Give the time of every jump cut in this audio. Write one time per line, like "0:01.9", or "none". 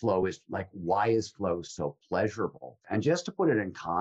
0:02.8